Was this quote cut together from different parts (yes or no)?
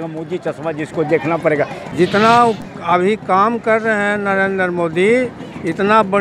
yes